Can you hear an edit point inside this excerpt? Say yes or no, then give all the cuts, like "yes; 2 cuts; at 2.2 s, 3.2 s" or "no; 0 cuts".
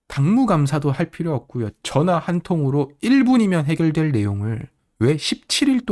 no; 0 cuts